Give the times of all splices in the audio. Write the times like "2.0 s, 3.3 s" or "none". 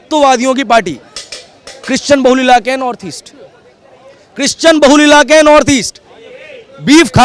none